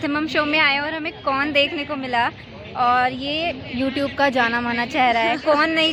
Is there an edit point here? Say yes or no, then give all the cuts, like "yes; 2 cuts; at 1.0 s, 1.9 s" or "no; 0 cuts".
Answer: no; 0 cuts